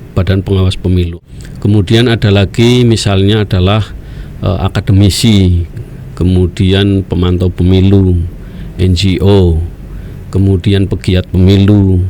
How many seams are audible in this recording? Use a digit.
1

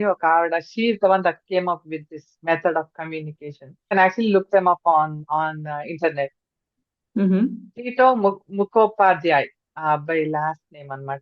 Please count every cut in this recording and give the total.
1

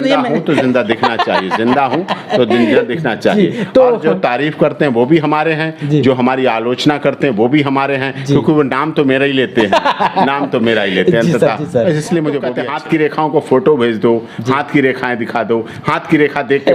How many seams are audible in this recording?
1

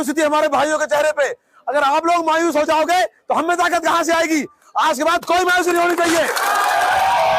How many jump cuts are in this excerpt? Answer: 0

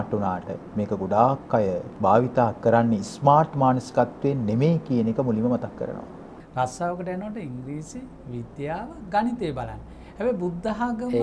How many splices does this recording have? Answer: 2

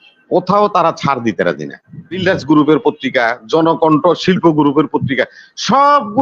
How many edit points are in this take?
1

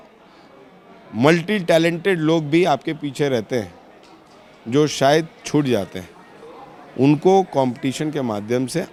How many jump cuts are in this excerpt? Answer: 0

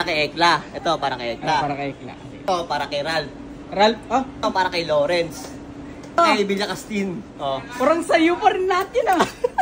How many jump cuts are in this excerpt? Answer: 3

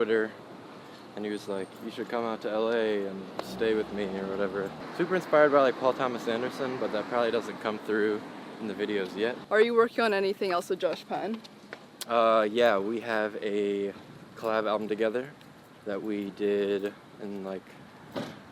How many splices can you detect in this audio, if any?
2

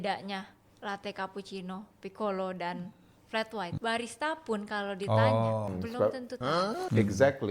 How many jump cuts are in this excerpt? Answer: 2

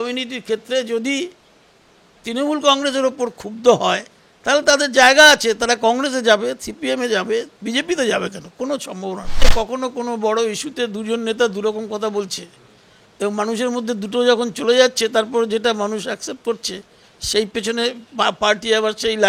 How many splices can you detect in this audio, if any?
1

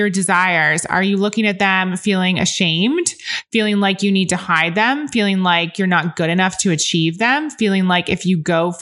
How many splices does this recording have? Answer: 0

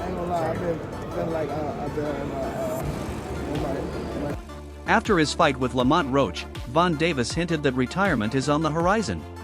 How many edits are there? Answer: 1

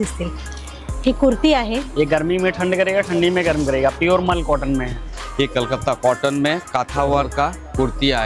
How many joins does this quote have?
2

